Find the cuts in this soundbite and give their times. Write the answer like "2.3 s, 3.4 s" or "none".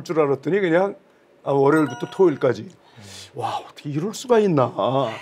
none